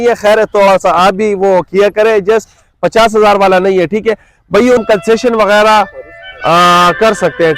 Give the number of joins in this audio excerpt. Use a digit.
1